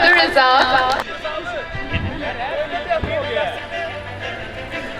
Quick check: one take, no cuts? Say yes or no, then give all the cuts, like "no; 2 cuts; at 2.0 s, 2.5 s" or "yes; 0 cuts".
no; 1 cut; at 1.0 s